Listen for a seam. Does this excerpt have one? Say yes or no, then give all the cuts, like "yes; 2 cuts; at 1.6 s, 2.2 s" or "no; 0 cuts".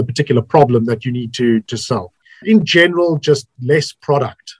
yes; 1 cut; at 2.3 s